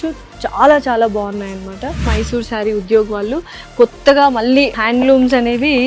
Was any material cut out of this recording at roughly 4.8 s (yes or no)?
yes